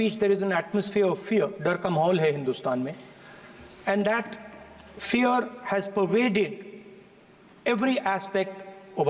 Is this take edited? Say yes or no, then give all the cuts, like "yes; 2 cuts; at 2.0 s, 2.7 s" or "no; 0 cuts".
no; 0 cuts